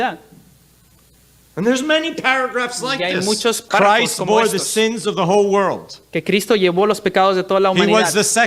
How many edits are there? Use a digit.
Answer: 1